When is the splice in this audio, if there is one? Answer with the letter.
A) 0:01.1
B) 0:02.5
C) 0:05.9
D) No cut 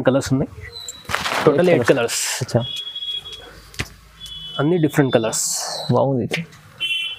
D